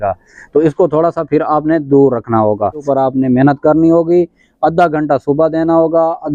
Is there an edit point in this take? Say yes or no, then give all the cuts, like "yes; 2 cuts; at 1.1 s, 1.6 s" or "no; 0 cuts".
yes; 1 cut; at 2.9 s